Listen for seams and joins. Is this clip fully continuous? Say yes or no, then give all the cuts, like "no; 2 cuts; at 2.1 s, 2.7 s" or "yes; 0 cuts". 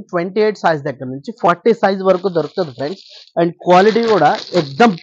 yes; 0 cuts